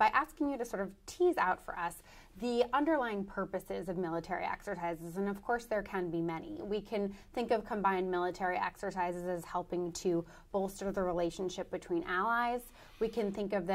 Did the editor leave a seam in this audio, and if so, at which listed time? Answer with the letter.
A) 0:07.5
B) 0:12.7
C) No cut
C